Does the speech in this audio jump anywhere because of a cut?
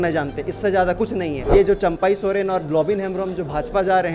yes; 1 cut; at 1.4 s

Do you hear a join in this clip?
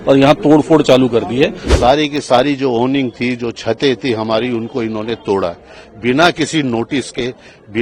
yes; 1 cut; at 1.6 s

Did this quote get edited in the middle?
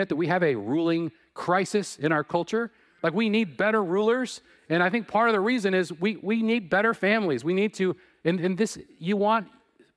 no; 0 cuts

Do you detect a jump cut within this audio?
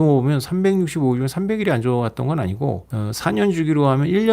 yes; 1 cut; at 2.9 s

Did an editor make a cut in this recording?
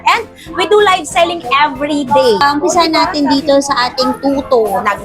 yes; 1 cut; at 2.4 s

